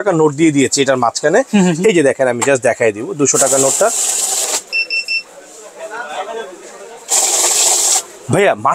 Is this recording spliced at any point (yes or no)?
no